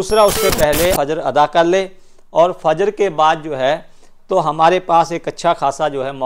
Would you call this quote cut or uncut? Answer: cut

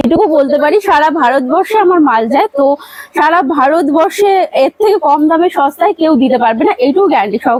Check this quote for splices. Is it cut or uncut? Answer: uncut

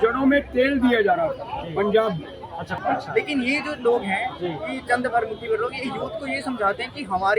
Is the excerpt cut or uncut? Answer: cut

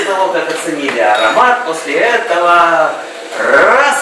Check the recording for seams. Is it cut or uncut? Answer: uncut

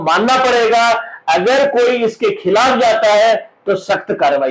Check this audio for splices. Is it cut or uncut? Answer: uncut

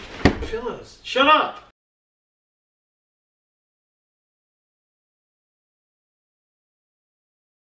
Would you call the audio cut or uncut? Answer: uncut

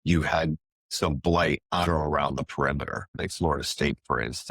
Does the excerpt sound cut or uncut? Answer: cut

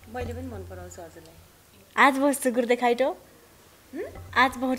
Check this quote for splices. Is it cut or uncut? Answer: cut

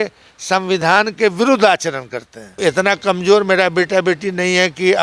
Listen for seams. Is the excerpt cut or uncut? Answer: cut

